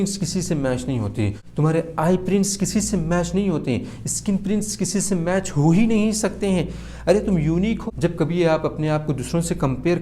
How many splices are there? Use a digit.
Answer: 1